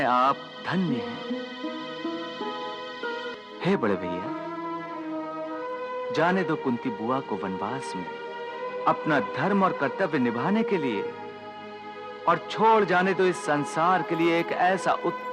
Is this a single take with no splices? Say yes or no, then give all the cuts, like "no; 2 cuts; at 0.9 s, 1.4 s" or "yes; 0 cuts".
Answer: no; 1 cut; at 3.4 s